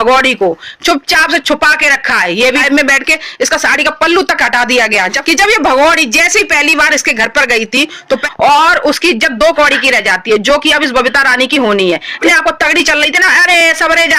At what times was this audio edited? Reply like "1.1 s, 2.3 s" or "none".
2.6 s, 5.2 s, 8.3 s, 12.1 s